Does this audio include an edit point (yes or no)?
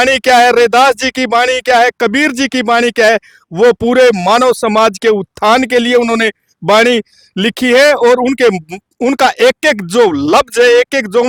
no